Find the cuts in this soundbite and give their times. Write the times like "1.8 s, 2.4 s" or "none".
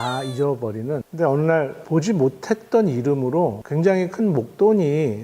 1.0 s, 1.8 s, 3.6 s